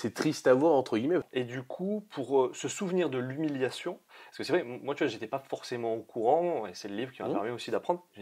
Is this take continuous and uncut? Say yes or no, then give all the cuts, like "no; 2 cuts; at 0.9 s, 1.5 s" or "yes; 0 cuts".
no; 1 cut; at 1.3 s